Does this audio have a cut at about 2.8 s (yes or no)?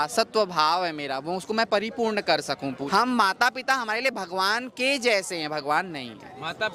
yes